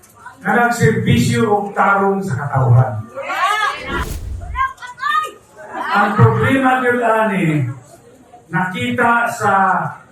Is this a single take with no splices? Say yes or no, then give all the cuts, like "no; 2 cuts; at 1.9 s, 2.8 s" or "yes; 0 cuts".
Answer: no; 1 cut; at 4.0 s